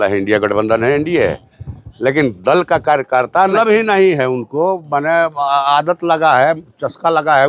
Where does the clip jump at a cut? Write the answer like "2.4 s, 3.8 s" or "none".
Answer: 3.5 s

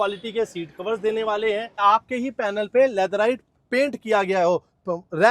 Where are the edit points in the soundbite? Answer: 1.8 s

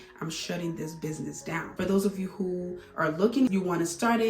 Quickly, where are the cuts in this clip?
1.7 s, 3.5 s

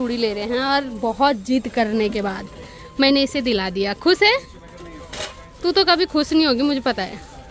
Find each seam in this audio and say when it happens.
none

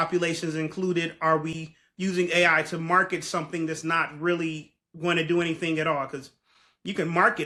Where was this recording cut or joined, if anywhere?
none

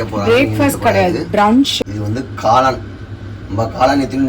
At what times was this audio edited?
1.7 s

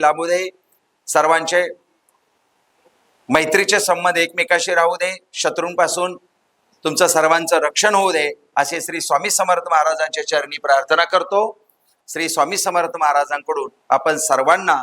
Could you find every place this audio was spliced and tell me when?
12.0 s

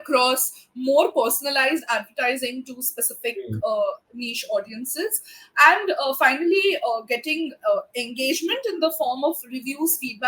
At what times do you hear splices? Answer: none

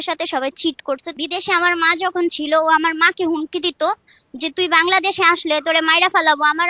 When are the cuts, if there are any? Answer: 1.1 s

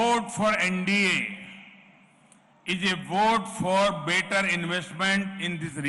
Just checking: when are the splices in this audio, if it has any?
none

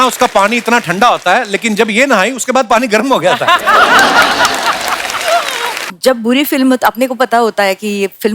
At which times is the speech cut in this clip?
5.8 s

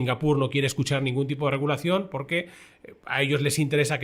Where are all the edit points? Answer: none

